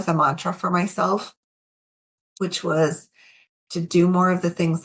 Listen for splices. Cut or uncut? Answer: uncut